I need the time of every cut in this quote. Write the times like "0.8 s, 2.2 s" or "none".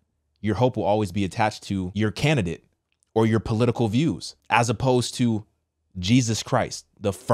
1.9 s, 4.3 s